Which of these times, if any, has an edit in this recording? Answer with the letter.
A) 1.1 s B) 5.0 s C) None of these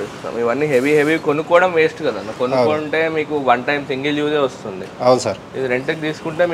C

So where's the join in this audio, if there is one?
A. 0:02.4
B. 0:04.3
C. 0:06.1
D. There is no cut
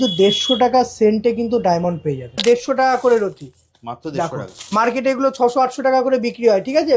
A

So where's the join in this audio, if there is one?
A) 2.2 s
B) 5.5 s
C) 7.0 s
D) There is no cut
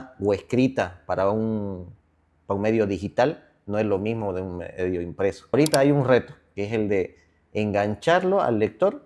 B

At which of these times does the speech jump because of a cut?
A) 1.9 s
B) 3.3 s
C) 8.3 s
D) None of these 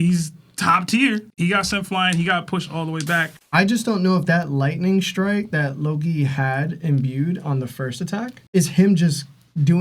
B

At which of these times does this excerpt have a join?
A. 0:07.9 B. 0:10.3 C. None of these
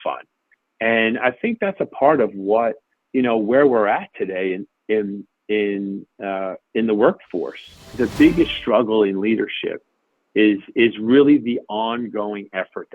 A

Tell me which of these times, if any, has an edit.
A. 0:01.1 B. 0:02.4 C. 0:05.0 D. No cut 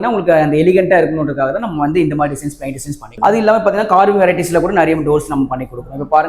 D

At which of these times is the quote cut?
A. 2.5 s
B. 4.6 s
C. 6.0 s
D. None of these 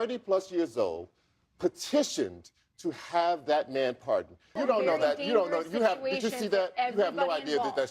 B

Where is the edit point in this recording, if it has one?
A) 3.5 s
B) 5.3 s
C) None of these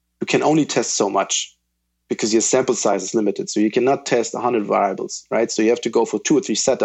C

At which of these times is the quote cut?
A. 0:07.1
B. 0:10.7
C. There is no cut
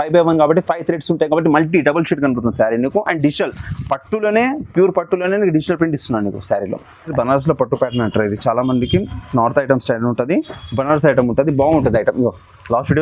A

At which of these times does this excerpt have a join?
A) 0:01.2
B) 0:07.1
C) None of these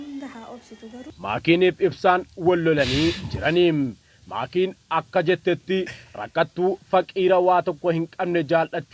A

